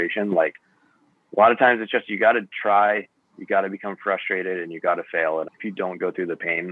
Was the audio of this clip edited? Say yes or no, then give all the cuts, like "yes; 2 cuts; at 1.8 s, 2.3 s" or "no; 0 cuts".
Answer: yes; 1 cut; at 5.5 s